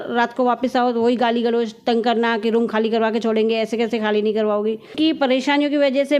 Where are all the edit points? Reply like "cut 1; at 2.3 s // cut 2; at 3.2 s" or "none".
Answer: cut 1; at 4.9 s